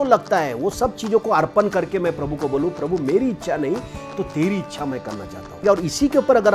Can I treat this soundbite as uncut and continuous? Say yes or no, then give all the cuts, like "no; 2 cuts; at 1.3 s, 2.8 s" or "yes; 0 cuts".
no; 1 cut; at 5.6 s